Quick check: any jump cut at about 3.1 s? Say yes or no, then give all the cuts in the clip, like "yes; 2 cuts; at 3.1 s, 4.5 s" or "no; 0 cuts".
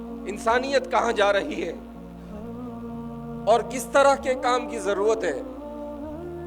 yes; 3 cuts; at 1.7 s, 3.1 s, 5.4 s